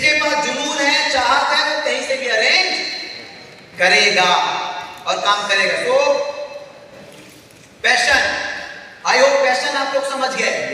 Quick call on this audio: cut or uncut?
uncut